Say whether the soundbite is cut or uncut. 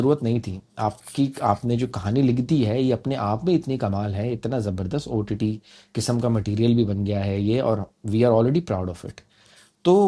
uncut